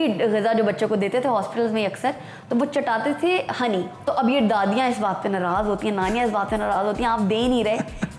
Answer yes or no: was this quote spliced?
yes